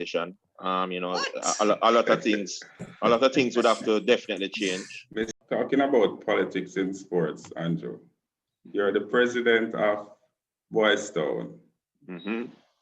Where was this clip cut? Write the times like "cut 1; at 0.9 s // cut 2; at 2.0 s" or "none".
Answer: cut 1; at 5.3 s